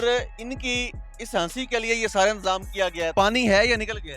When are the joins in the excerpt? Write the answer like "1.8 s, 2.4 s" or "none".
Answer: 3.1 s